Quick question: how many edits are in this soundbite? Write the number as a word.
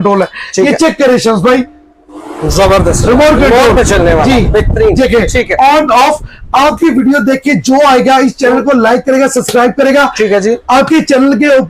zero